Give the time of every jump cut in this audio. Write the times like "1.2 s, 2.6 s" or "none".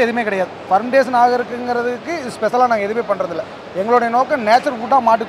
none